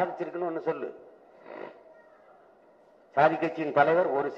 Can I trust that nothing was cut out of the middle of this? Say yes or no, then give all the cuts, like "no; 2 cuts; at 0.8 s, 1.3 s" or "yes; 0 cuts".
yes; 0 cuts